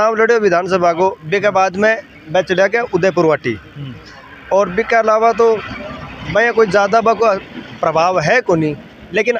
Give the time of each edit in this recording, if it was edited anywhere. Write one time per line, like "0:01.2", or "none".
none